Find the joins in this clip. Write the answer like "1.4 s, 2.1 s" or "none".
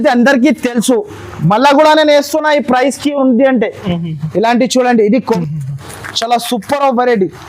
5.4 s